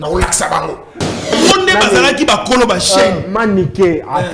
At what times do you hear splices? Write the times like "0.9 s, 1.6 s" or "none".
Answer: 1.3 s